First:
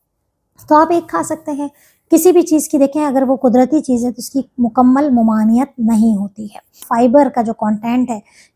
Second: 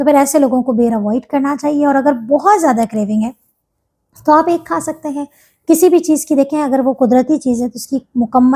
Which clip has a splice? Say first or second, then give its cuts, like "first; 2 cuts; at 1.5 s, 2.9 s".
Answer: first; 1 cut; at 6.8 s